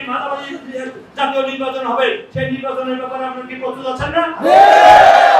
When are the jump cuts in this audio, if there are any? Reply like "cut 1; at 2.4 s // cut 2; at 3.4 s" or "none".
none